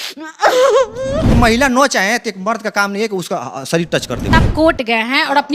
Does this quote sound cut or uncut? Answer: cut